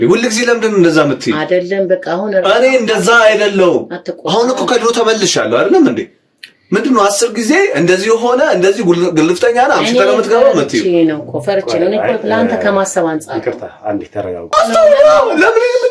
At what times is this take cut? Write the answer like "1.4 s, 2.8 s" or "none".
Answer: 14.5 s